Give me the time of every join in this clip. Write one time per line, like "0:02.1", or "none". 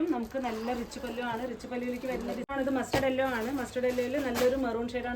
0:02.5